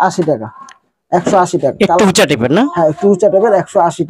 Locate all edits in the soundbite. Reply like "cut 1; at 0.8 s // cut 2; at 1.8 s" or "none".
none